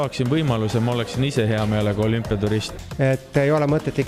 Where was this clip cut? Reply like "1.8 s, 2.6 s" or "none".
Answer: 2.7 s